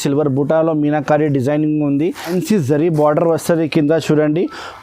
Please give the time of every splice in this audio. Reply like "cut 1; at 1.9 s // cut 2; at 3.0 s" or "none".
cut 1; at 2.3 s